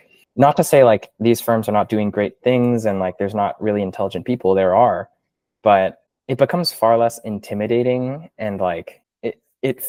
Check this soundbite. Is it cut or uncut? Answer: uncut